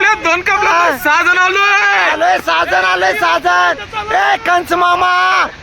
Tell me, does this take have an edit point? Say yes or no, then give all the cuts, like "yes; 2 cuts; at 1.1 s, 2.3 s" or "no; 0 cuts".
no; 0 cuts